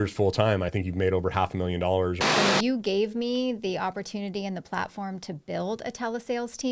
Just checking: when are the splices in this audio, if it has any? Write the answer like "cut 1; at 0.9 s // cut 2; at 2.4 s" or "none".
cut 1; at 2.2 s